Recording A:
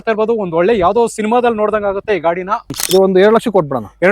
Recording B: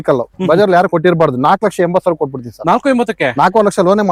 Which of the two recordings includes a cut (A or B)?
A